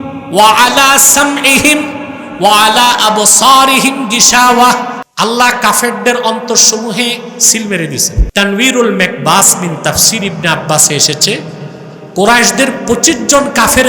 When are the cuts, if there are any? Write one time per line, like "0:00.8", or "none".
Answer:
0:05.0
0:08.2

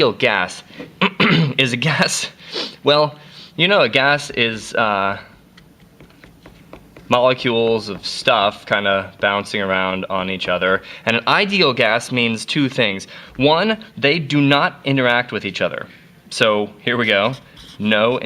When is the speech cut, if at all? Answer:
0:08.4

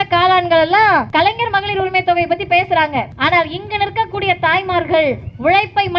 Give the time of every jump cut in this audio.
0:01.1
0:03.1

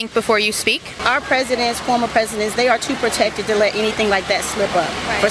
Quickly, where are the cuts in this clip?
0:00.9

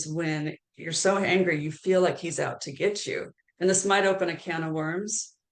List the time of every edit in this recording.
none

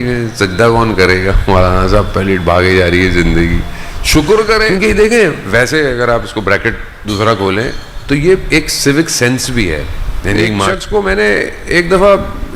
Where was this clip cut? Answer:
0:04.7
0:10.7

